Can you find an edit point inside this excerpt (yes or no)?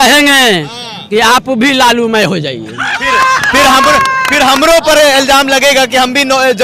no